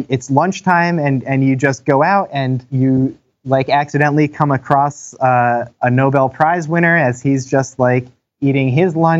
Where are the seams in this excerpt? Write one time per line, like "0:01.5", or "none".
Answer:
0:02.7
0:05.7